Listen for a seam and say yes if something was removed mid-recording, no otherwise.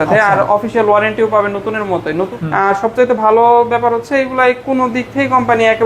yes